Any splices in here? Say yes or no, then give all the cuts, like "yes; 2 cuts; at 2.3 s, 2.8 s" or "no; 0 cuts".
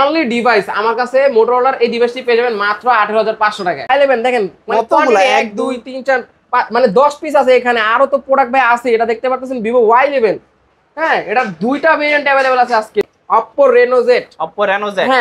yes; 2 cuts; at 3.9 s, 13.1 s